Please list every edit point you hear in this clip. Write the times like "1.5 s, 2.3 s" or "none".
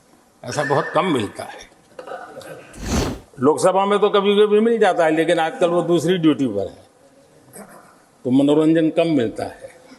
3.1 s